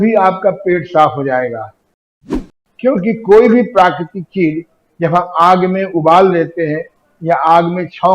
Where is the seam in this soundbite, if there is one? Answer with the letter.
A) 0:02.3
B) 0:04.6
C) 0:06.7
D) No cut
A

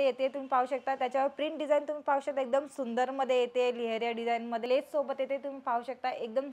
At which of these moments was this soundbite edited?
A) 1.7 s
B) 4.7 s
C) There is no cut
B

